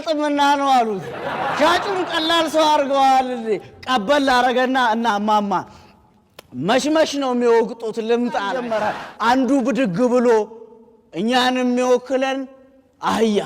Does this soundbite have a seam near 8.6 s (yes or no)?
yes